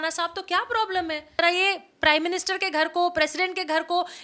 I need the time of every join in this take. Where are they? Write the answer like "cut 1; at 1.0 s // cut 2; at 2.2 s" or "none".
cut 1; at 1.4 s

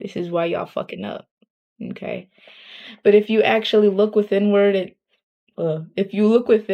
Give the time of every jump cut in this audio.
none

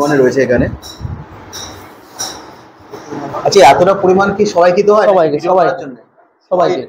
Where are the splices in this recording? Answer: cut 1; at 3.3 s

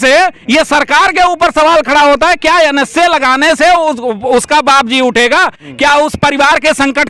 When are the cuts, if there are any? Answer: none

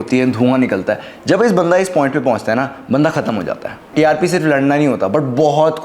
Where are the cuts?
cut 1; at 3.9 s

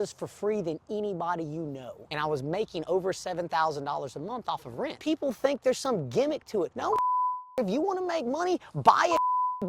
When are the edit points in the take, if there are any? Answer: cut 1; at 2.0 s // cut 2; at 5.0 s

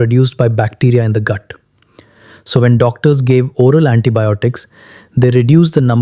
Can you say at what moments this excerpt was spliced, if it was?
none

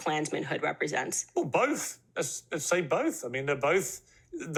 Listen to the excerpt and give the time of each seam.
none

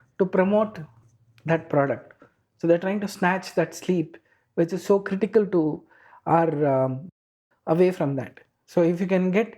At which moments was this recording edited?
cut 1; at 7.1 s

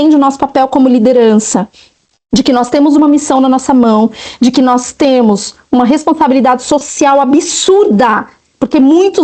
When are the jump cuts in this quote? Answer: none

